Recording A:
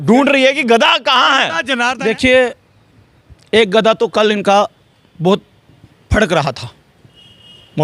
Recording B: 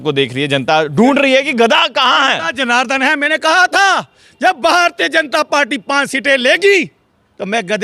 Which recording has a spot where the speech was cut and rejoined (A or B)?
A